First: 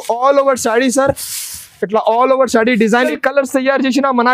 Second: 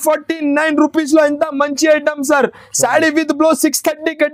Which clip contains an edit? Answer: first; 1 cut; at 3.1 s

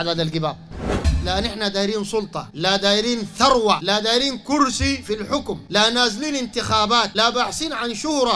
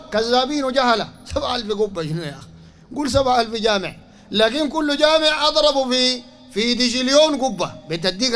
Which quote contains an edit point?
first; 5 cuts; at 0.9 s, 2.4 s, 3.8 s, 5.6 s, 7.1 s

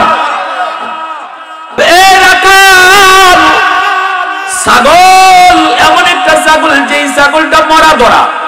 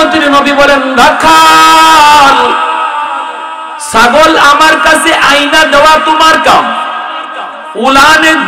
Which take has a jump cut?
first; 1 cut; at 1.7 s

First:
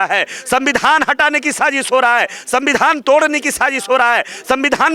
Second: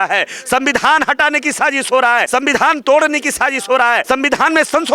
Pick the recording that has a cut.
second; 2 cuts; at 2.3 s, 4.0 s

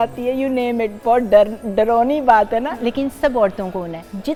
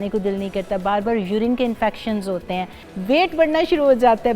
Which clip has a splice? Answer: second; 1 cut; at 2.8 s

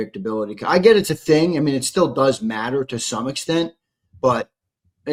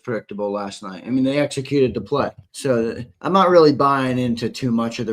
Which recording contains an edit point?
second; 1 cut; at 2.7 s

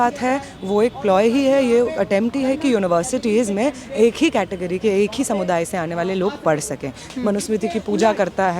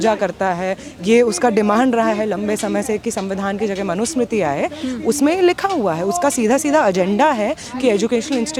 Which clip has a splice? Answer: first; 1 cut; at 7.0 s

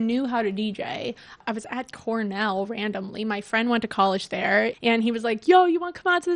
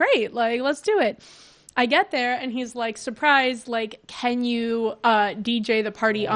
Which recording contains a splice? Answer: first; 2 cuts; at 1.4 s, 4.8 s

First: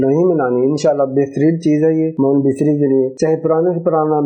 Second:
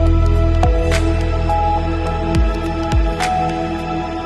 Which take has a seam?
first; 2 cuts; at 2.1 s, 3.1 s

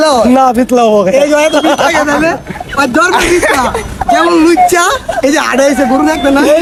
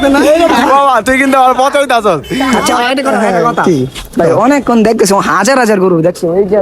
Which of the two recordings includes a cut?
second; 1 cut; at 2.6 s

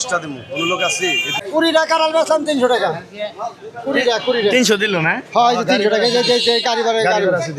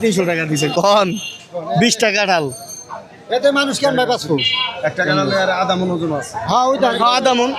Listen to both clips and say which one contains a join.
first; 1 cut; at 1.3 s

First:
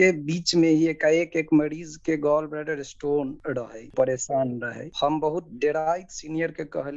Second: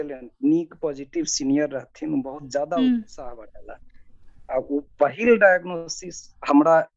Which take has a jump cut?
first; 1 cut; at 3.9 s

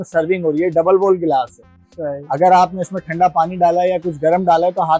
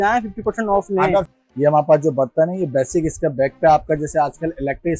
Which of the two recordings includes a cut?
second; 1 cut; at 1.3 s

